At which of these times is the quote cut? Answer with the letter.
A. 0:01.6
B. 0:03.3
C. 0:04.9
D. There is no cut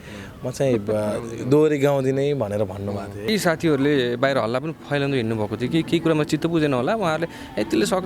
B